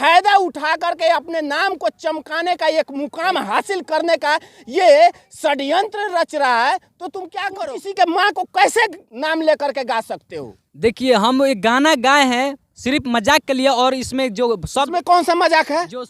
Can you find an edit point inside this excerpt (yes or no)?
yes